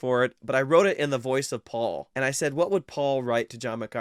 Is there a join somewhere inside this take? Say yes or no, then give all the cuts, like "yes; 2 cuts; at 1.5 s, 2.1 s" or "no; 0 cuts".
yes; 1 cut; at 2.1 s